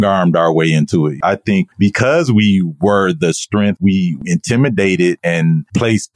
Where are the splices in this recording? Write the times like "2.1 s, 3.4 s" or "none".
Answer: 1.2 s, 3.8 s, 5.2 s